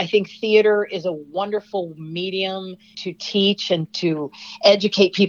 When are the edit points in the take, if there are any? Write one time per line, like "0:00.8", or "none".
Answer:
0:03.0